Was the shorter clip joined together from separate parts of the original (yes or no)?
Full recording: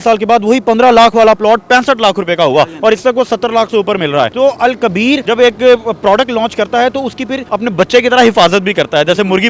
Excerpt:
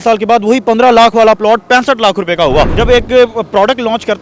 yes